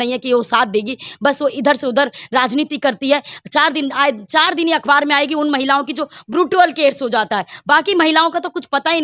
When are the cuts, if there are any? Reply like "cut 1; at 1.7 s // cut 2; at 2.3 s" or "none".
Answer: none